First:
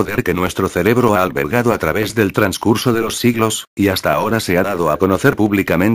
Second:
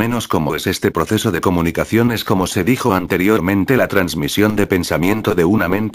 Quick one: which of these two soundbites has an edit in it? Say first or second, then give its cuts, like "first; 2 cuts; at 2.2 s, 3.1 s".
second; 1 cut; at 1.5 s